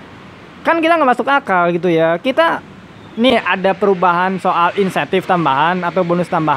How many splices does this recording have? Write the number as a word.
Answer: one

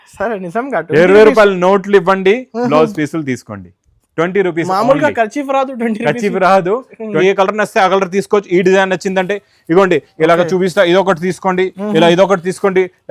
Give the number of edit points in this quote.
one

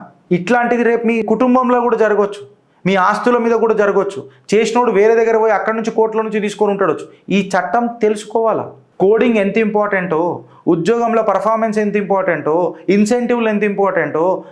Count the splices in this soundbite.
one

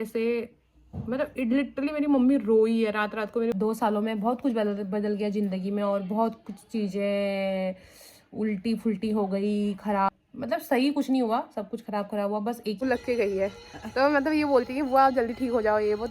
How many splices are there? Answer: three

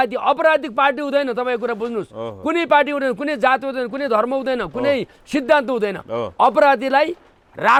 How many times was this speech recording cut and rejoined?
zero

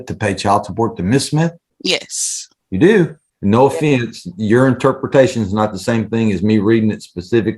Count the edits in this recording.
two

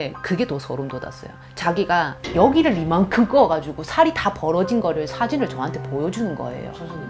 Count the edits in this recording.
one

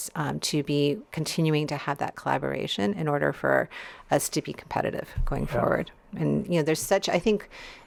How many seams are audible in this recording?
zero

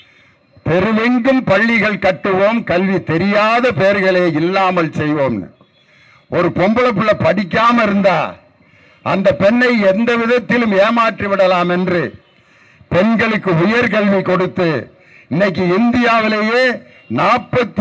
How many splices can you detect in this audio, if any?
zero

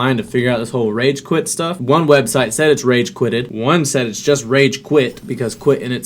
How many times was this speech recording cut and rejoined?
three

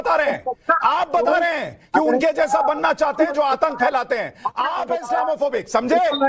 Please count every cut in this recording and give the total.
zero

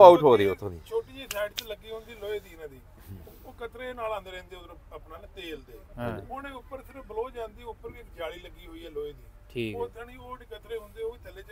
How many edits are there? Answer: zero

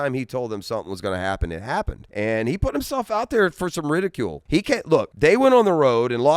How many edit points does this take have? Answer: two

